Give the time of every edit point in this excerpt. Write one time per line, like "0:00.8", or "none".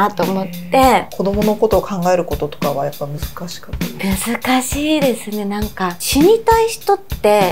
0:01.1